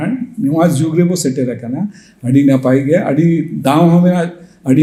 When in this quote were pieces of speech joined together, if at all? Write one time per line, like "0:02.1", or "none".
none